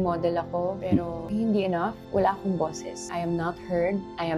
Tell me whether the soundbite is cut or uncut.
cut